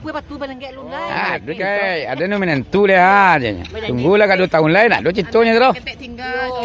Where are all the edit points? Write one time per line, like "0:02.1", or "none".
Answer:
0:01.5